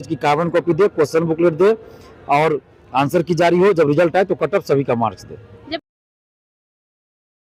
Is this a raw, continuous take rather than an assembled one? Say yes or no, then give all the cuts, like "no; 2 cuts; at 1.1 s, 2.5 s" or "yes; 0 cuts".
yes; 0 cuts